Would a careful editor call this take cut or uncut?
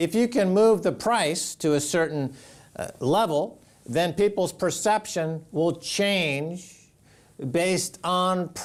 uncut